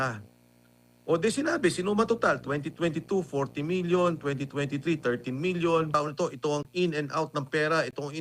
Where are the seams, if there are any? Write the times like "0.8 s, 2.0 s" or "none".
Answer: 5.9 s